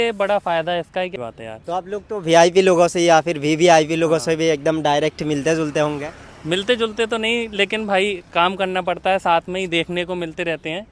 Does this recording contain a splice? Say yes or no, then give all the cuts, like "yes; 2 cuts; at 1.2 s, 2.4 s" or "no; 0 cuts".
yes; 1 cut; at 1.1 s